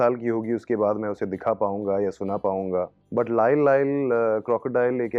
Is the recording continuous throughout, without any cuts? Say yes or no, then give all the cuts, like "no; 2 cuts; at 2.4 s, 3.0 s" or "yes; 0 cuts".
yes; 0 cuts